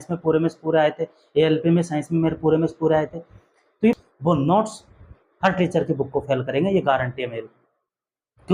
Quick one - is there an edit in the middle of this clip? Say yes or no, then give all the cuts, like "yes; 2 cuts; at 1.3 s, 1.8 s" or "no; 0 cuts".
yes; 1 cut; at 4.0 s